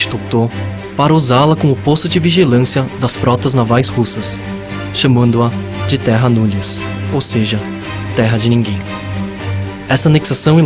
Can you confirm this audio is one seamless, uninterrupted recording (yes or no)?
no